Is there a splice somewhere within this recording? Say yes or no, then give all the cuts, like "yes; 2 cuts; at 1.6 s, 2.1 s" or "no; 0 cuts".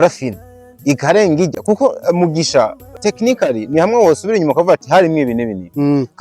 yes; 1 cut; at 2.9 s